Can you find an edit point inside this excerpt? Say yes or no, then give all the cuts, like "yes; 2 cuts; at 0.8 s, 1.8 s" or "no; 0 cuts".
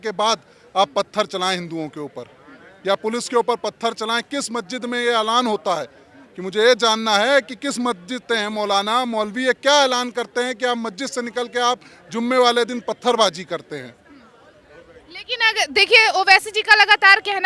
no; 0 cuts